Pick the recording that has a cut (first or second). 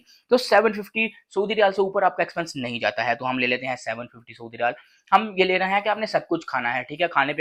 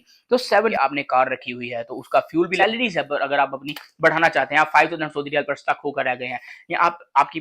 second